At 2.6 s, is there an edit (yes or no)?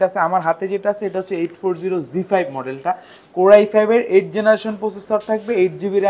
no